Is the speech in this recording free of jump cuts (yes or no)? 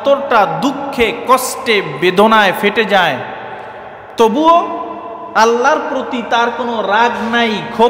yes